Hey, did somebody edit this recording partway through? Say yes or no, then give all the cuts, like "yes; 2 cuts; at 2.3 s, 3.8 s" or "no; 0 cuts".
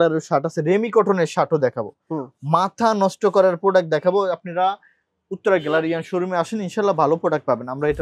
no; 0 cuts